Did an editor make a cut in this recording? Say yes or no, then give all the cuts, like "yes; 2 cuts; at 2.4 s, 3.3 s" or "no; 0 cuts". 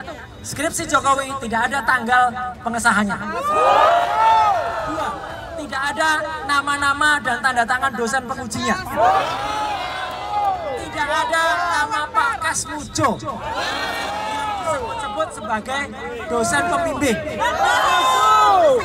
no; 0 cuts